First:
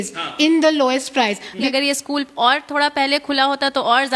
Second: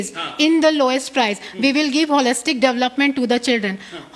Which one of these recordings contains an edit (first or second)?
first